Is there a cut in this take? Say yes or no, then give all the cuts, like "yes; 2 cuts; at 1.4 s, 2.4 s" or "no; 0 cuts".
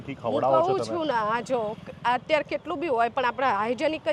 no; 0 cuts